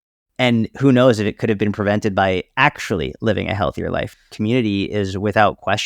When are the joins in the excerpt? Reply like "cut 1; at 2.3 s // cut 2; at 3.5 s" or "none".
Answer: cut 1; at 4.2 s